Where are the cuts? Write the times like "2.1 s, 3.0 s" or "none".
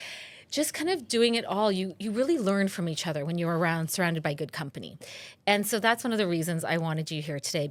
none